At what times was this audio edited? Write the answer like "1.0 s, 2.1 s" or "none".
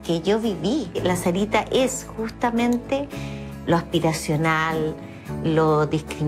none